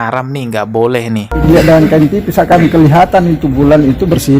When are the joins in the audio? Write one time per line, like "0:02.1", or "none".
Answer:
0:01.3